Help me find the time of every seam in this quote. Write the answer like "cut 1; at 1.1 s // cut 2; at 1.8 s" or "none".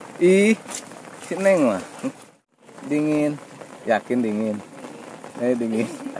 cut 1; at 2.7 s